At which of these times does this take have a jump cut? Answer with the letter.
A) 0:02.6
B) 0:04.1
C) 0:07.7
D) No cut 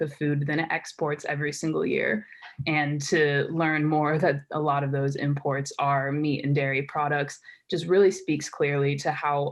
D